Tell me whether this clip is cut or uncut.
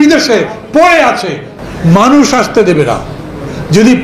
cut